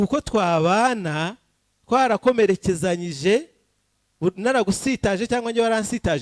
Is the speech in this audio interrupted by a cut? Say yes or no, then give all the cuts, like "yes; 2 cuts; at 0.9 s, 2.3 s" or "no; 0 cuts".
no; 0 cuts